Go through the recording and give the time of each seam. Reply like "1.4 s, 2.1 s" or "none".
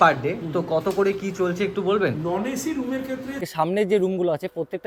3.5 s